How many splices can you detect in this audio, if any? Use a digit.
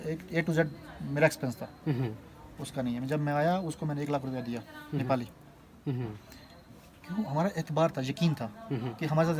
0